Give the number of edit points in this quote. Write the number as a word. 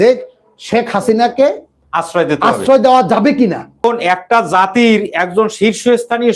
one